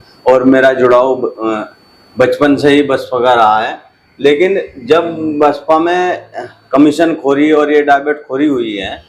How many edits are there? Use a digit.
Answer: 0